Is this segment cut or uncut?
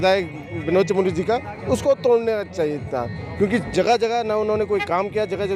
uncut